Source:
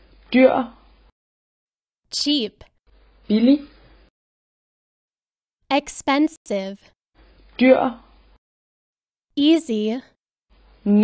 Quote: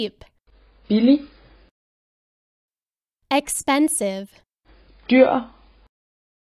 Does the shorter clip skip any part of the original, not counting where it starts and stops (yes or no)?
yes